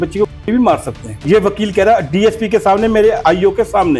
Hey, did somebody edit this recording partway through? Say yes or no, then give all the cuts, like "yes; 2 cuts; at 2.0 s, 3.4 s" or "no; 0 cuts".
yes; 2 cuts; at 1.2 s, 3.2 s